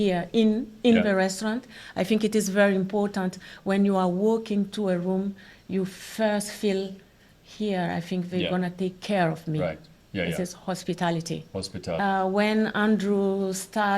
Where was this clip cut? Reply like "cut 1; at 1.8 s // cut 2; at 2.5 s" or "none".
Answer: cut 1; at 11.9 s